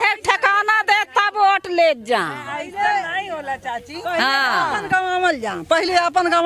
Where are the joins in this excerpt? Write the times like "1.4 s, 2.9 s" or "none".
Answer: none